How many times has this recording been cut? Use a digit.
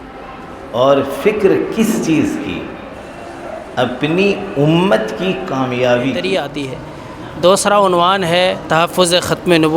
1